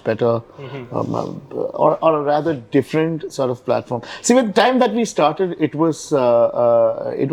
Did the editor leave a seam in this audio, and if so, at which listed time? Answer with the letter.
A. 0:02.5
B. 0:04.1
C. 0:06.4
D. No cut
D